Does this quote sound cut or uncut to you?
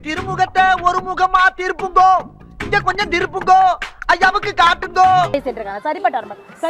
cut